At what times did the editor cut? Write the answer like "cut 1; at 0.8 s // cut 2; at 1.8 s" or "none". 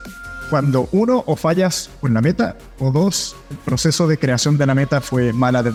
none